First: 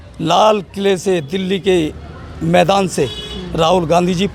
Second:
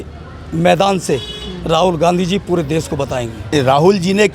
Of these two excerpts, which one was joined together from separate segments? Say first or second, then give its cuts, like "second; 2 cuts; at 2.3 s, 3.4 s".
second; 1 cut; at 3.4 s